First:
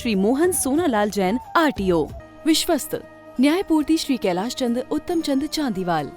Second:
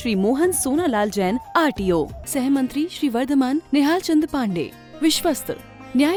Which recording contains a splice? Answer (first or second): first